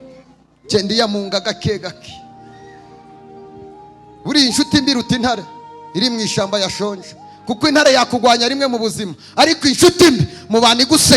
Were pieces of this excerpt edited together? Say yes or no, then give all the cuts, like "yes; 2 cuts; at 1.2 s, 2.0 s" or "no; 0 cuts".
no; 0 cuts